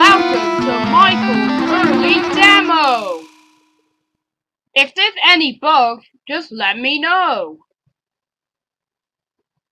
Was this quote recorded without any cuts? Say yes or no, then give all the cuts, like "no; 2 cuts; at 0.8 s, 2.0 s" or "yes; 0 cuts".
no; 1 cut; at 1.3 s